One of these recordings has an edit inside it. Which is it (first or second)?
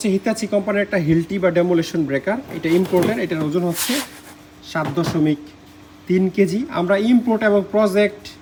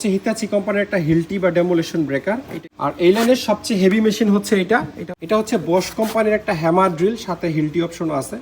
second